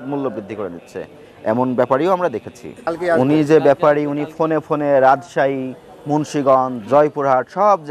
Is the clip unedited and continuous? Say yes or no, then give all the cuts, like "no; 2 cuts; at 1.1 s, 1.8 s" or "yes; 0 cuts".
no; 1 cut; at 2.8 s